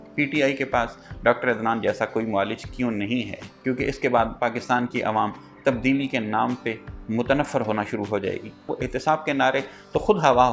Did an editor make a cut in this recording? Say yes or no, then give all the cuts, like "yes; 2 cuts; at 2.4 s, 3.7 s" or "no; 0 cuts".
yes; 2 cuts; at 3.4 s, 8.7 s